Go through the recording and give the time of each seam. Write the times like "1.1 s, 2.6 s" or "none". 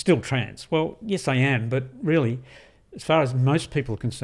none